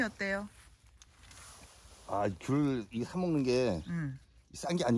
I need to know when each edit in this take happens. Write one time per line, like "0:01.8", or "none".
0:01.1